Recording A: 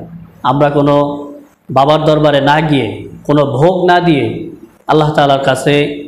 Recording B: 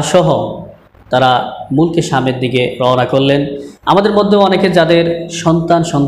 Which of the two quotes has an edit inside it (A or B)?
B